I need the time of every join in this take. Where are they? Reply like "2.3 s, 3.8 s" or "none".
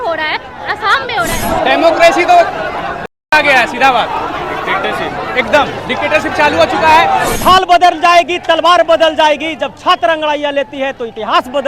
1.4 s, 7.3 s